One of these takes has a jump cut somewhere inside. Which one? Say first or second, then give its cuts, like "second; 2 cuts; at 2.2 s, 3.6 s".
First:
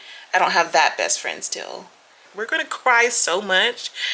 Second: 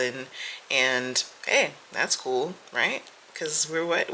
first; 1 cut; at 2.2 s